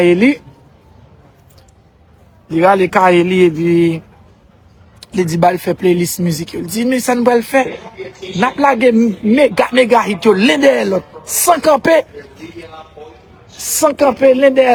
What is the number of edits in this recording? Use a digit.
0